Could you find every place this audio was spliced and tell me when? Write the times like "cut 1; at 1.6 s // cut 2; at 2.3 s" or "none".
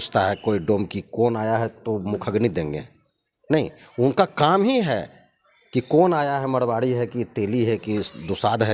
none